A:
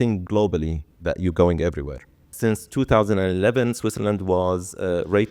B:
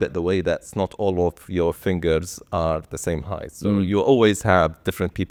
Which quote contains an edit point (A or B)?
A